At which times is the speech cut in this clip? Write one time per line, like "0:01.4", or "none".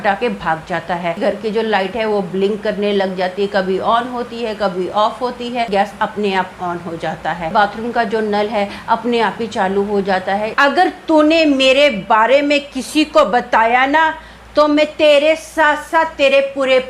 0:01.2
0:05.7
0:07.5
0:10.5